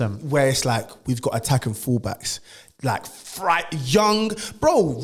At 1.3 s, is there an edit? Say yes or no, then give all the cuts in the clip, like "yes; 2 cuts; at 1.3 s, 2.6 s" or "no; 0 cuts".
no; 0 cuts